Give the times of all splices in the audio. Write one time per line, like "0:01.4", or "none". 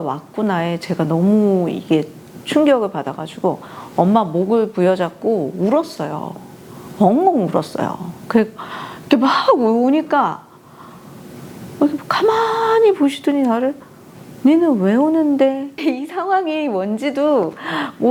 none